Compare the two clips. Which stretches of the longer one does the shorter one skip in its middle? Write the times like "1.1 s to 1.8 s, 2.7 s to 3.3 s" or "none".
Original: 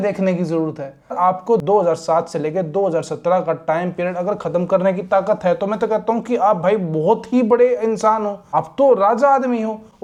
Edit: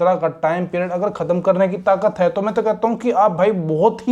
none